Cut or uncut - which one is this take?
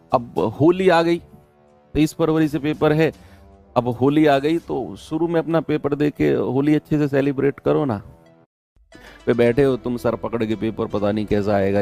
cut